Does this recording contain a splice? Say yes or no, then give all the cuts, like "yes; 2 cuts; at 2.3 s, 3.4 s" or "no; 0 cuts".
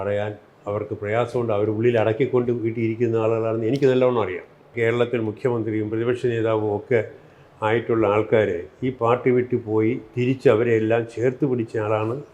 yes; 1 cut; at 4.7 s